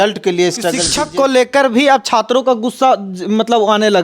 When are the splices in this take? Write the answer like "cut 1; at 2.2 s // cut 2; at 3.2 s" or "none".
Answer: cut 1; at 1.1 s